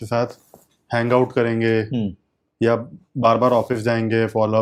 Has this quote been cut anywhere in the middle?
no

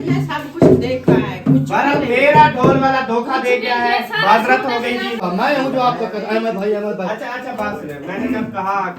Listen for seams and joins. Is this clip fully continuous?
no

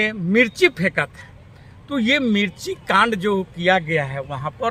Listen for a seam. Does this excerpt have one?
no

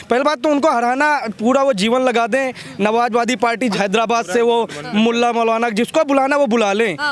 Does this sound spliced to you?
yes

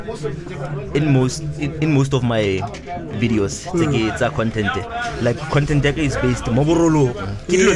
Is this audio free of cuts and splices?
yes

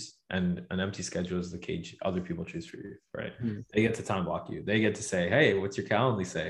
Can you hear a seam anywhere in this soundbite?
no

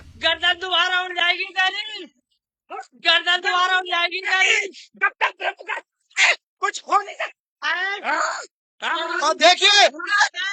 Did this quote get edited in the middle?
no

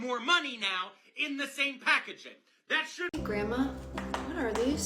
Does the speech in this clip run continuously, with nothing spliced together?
no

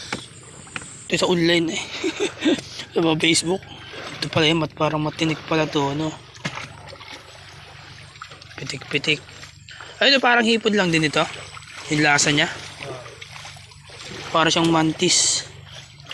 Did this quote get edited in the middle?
yes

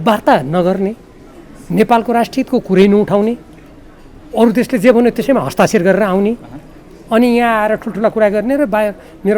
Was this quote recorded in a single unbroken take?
yes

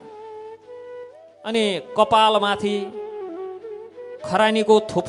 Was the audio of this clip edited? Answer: yes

